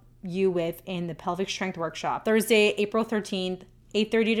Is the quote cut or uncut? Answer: cut